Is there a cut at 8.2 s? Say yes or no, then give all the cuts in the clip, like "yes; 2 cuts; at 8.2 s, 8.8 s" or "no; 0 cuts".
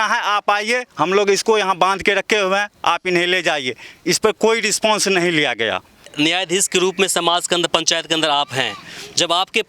no; 1 cut; at 6.0 s